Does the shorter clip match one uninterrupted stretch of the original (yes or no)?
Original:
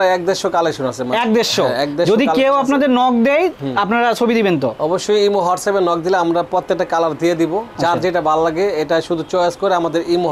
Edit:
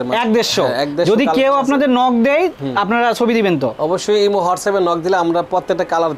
yes